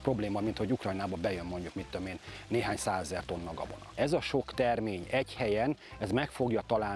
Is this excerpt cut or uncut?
cut